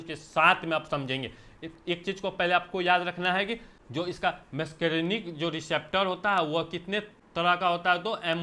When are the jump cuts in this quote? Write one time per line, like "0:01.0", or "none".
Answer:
0:03.8
0:07.2